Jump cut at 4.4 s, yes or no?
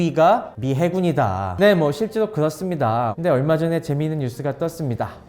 no